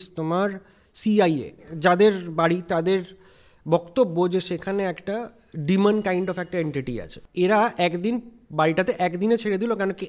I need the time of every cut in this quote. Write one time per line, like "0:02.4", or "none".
0:01.7
0:07.2